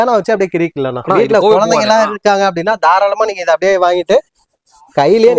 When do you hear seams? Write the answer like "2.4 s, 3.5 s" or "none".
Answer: 1.0 s